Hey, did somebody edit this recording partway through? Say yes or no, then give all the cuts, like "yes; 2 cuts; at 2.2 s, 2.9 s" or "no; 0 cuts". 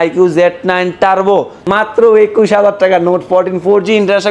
yes; 1 cut; at 1.6 s